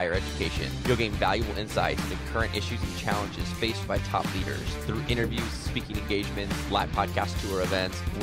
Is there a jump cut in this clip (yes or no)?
no